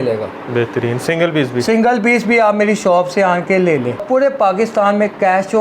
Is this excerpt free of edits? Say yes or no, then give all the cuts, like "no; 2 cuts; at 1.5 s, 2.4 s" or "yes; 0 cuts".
no; 1 cut; at 4.0 s